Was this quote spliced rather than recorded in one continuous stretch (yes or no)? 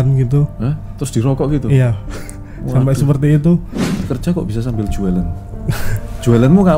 yes